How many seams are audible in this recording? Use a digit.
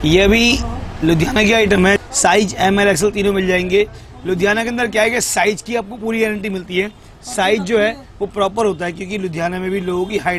1